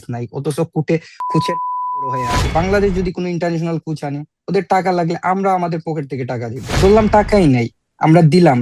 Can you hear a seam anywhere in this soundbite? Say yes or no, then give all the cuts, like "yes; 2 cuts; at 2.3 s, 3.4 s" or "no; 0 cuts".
yes; 2 cuts; at 2.4 s, 6.8 s